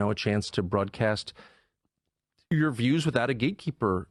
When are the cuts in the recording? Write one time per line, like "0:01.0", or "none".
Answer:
none